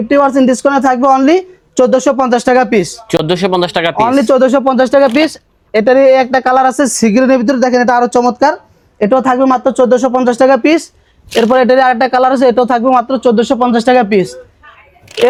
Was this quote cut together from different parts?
no; 0 cuts

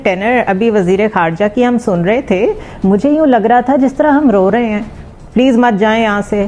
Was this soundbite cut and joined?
no; 0 cuts

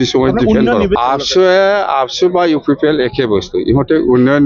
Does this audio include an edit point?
yes; 1 cut; at 0.9 s

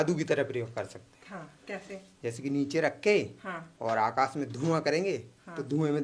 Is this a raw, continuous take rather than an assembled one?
yes; 0 cuts

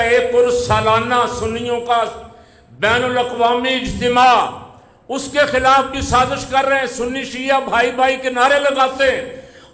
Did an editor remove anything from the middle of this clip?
no; 0 cuts

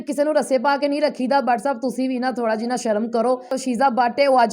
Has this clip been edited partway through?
yes; 1 cut; at 3.5 s

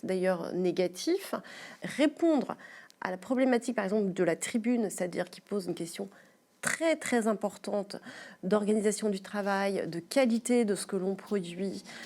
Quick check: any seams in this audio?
yes; 1 cut; at 1.7 s

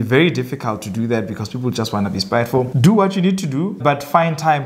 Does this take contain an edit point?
yes; 2 cuts; at 2.7 s, 3.8 s

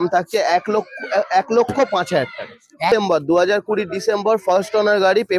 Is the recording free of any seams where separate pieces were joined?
no; 1 cut; at 2.9 s

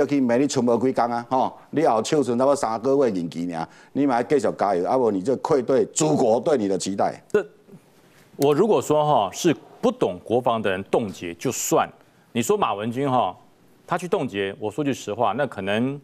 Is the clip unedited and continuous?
no; 1 cut; at 7.2 s

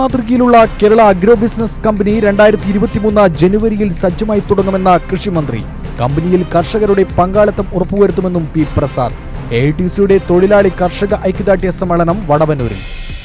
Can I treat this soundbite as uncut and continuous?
yes; 0 cuts

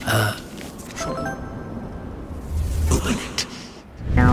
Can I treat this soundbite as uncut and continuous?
yes; 0 cuts

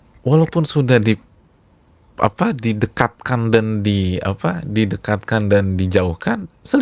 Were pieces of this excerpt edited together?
no; 0 cuts

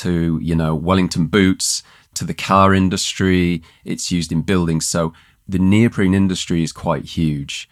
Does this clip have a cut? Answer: no; 0 cuts

